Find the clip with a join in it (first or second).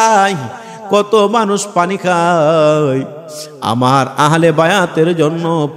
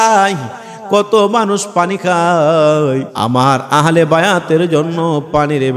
second